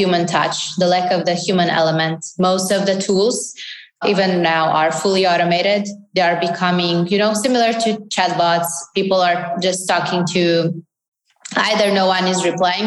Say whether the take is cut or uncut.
cut